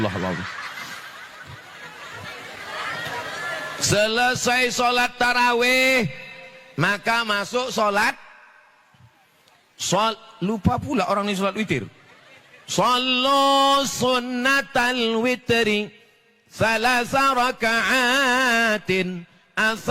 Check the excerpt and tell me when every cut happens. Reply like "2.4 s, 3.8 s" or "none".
none